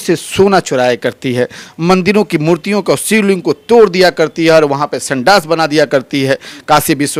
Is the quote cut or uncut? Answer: uncut